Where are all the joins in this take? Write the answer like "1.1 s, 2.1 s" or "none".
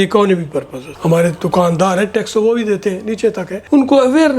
0.9 s